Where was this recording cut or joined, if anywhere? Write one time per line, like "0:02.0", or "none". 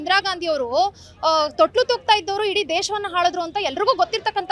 none